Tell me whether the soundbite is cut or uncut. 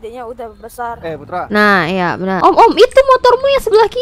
cut